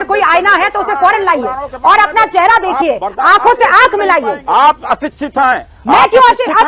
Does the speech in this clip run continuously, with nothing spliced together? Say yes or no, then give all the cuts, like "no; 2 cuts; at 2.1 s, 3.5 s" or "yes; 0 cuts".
no; 1 cut; at 4.4 s